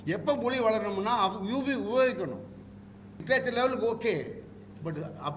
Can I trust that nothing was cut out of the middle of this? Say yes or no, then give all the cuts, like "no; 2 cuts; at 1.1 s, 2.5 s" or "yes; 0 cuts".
no; 1 cut; at 3.2 s